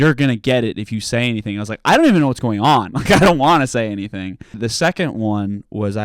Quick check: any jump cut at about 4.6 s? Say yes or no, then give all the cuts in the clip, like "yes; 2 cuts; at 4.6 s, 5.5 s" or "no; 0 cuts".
yes; 1 cut; at 4.6 s